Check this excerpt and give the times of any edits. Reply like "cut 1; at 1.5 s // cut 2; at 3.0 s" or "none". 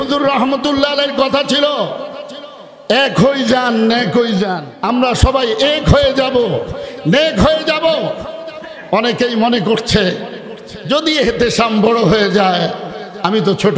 cut 1; at 4.7 s